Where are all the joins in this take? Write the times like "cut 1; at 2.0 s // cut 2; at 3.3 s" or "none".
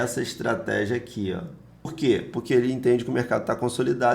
cut 1; at 1.9 s